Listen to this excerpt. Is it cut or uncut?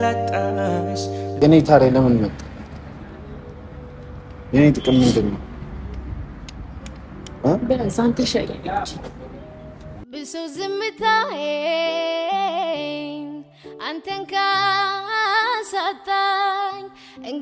cut